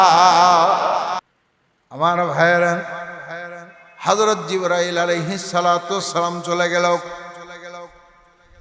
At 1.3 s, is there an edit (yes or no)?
yes